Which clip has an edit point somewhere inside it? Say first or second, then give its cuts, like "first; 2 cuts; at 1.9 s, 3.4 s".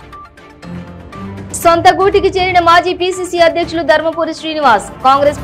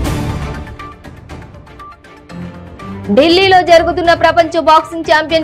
first; 1 cut; at 1.4 s